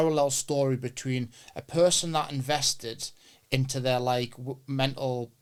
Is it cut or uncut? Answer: uncut